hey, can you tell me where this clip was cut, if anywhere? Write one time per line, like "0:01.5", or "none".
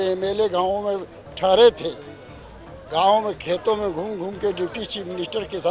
none